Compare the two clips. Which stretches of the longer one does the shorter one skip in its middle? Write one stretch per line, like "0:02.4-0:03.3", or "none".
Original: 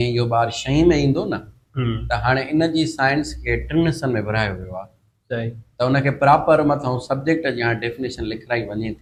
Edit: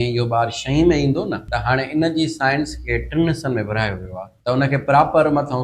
0:01.5-0:02.1
0:04.9-0:05.6